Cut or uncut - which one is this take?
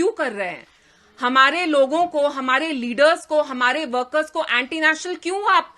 uncut